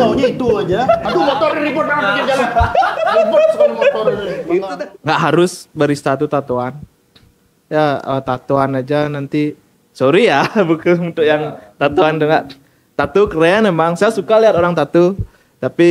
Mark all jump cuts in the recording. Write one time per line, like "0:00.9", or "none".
0:04.7